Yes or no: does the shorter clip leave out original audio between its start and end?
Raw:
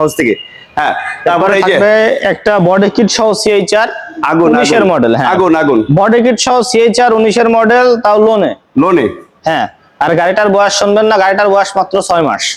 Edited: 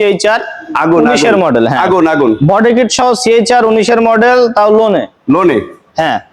no